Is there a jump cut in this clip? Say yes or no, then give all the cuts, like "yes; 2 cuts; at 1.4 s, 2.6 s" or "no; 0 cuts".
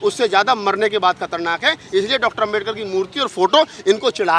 no; 0 cuts